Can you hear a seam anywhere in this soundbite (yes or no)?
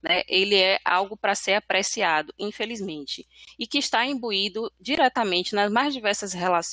no